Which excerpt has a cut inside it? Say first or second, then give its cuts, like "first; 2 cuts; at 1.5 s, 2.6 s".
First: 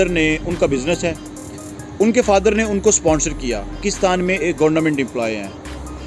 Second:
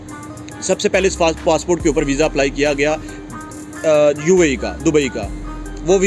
first; 1 cut; at 3.9 s